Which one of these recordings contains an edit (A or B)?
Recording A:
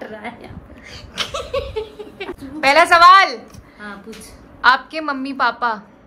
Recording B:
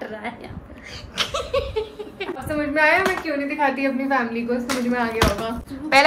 A